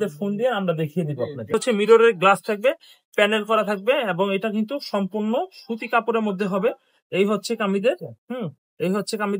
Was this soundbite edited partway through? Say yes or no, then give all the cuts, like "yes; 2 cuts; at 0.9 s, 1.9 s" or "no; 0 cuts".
yes; 1 cut; at 1.5 s